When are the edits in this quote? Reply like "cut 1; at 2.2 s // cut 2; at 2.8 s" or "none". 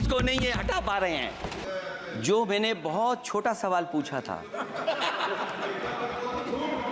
cut 1; at 1.6 s